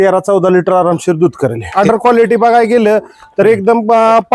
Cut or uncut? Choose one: cut